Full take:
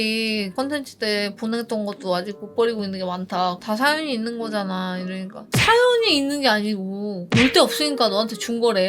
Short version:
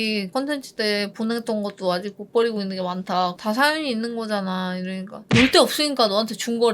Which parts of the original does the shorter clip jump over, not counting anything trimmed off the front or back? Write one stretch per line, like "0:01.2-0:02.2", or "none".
0:05.4-0:07.2

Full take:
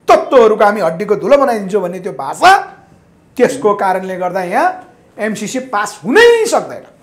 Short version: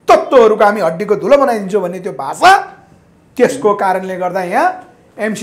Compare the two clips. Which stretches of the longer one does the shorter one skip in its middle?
none

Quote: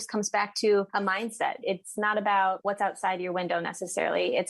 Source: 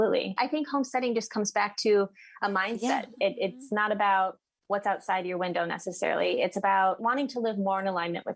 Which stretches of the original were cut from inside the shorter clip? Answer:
0:02.6-0:03.1
0:04.3-0:04.6

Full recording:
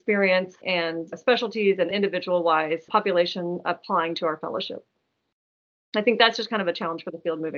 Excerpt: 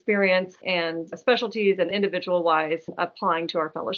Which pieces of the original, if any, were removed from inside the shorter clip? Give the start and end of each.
0:02.9-0:03.5

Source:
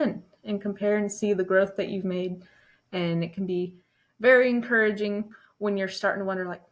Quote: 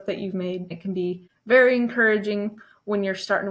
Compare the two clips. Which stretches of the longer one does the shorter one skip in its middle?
0:02.8-0:03.8

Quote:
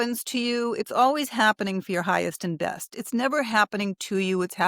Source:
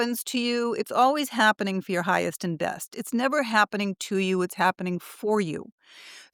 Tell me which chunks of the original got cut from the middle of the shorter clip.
none

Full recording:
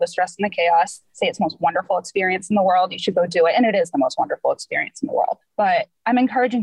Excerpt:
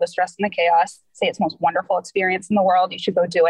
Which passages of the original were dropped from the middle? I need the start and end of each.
none

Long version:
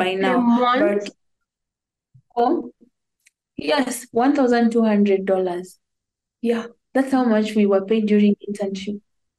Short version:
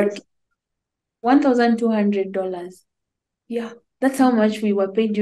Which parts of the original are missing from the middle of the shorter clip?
0:02.0-0:04.0

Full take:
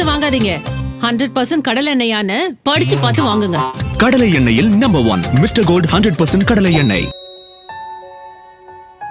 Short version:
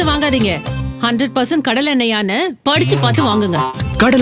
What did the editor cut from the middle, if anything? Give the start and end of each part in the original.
none

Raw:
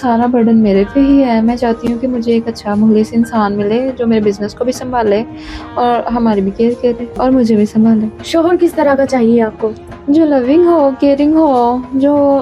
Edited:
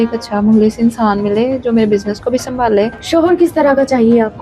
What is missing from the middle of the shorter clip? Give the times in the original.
0:05.3-0:08.2

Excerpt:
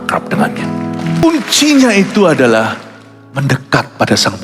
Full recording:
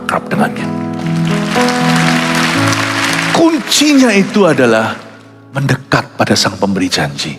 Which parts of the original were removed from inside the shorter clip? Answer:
0:01.2-0:03.4

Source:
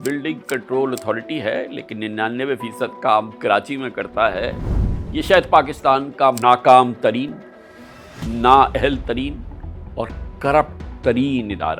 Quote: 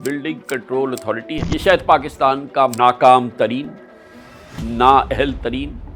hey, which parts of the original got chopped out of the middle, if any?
0:01.4-0:05.0

